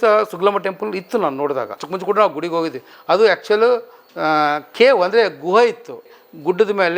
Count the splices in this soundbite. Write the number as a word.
one